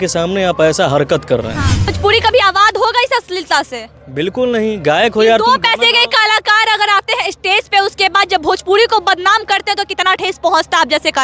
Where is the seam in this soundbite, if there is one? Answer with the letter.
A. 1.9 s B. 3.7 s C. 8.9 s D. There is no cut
A